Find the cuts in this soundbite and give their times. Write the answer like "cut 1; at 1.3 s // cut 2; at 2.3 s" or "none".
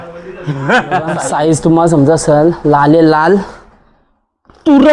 cut 1; at 1.2 s